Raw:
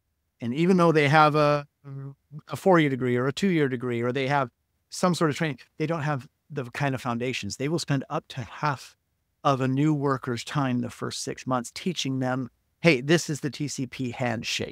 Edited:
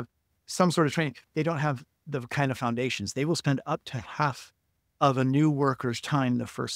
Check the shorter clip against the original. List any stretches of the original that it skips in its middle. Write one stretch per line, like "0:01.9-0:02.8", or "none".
none